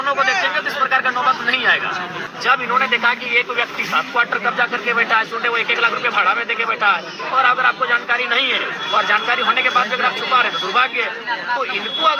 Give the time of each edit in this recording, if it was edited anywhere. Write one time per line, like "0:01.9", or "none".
0:02.3